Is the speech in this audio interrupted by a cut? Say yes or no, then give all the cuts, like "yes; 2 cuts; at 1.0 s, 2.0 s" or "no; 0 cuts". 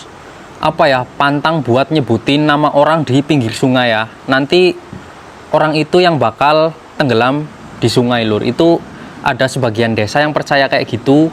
no; 0 cuts